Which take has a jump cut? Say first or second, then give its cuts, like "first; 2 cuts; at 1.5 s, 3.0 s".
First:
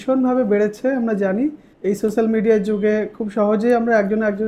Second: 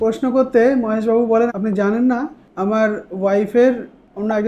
second; 1 cut; at 1.5 s